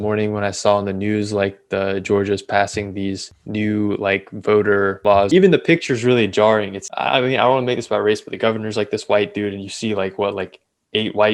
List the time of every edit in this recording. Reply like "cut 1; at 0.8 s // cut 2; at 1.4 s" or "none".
cut 1; at 3.3 s // cut 2; at 5.1 s // cut 3; at 6.8 s